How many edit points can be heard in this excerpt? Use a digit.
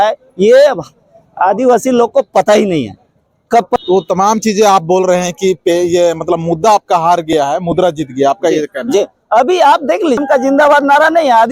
2